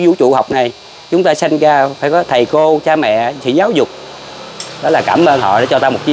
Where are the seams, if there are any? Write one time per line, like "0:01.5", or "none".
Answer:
none